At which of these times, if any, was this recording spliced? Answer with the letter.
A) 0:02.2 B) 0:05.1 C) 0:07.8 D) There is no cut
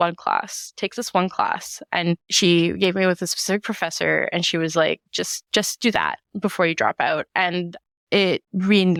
D